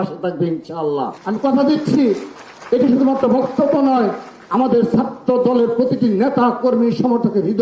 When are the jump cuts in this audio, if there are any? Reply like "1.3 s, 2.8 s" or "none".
none